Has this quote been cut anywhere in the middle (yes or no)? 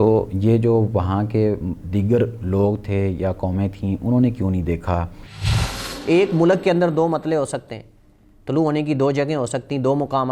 yes